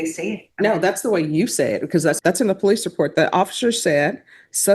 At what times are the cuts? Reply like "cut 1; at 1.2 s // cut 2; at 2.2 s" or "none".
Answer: cut 1; at 2.2 s